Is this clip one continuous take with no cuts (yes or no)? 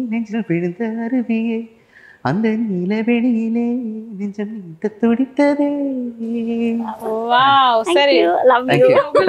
yes